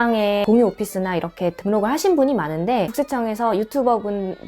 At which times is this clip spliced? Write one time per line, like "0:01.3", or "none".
0:02.9

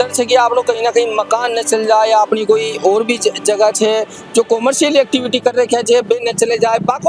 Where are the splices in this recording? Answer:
none

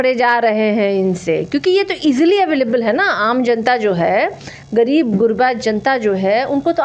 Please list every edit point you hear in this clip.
none

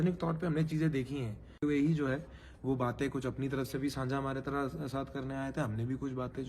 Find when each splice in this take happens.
0:01.6

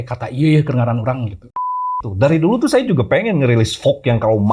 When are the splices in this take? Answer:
0:02.0

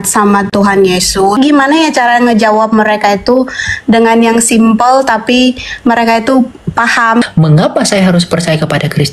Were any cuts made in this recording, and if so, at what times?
0:01.4
0:07.2

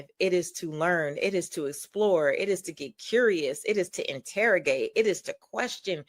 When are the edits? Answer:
none

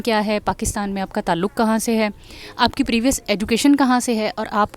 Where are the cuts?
none

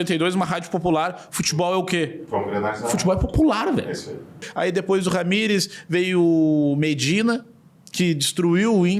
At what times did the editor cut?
0:04.5

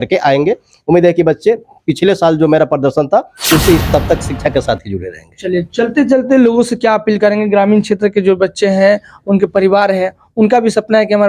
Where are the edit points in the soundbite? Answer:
0:03.8

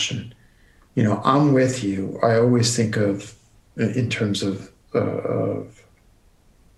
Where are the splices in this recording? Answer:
none

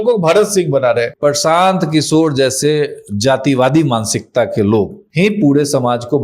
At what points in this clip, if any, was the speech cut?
0:01.2
0:05.0

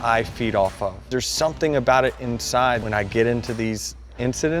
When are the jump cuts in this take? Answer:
0:01.0
0:02.8

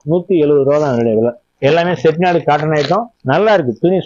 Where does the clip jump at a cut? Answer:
0:01.5
0:03.1

